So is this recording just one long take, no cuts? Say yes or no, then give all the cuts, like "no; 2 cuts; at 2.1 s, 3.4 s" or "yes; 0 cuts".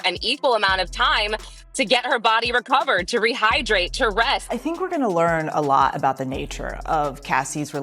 no; 1 cut; at 4.5 s